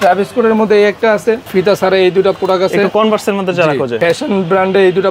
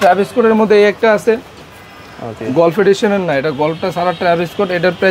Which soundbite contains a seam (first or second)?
first